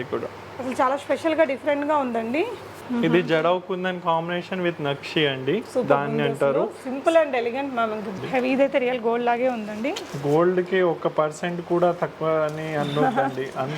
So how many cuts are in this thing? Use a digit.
2